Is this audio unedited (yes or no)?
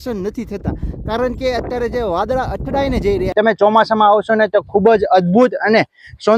no